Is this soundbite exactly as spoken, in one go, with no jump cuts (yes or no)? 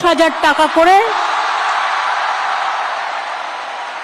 yes